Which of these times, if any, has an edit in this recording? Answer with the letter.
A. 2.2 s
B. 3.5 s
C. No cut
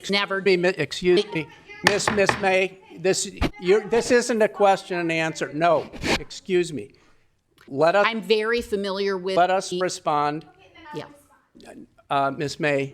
B